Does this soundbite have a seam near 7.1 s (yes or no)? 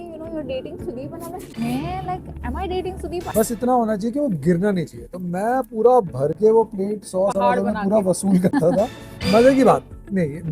no